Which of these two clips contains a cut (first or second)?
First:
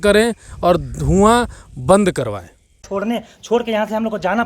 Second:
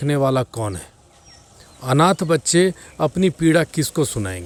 first